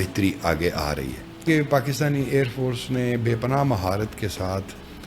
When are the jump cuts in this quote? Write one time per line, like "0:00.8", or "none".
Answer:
0:01.4